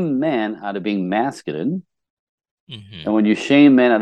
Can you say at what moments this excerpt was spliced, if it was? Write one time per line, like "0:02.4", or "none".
none